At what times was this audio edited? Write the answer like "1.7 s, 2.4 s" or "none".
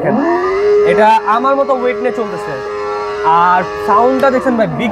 none